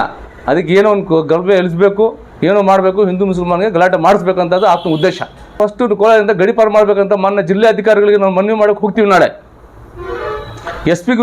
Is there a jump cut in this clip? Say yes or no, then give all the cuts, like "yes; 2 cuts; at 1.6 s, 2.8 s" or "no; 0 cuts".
yes; 1 cut; at 5.6 s